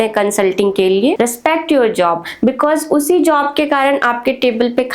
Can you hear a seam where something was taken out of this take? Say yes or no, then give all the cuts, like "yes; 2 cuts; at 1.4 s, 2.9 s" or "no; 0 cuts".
yes; 1 cut; at 1.1 s